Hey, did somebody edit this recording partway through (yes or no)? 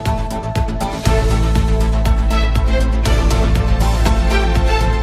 no